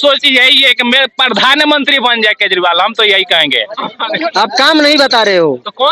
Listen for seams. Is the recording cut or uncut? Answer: cut